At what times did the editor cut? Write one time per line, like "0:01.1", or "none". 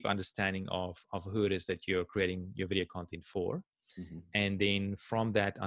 none